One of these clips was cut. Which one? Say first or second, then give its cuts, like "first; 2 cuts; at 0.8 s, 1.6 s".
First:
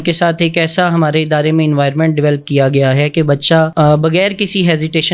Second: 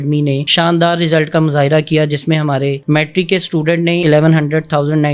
second; 1 cut; at 4.0 s